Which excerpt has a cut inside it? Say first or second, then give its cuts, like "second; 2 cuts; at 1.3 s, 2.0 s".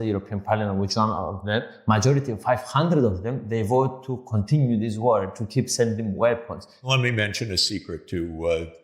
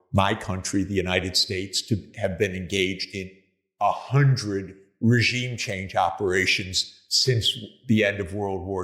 first; 2 cuts; at 1.7 s, 6.9 s